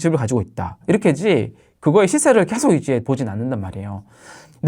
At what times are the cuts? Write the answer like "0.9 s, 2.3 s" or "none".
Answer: 3.0 s